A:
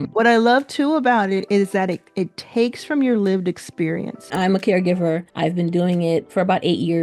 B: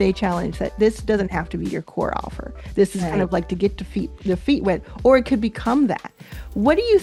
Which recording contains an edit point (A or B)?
A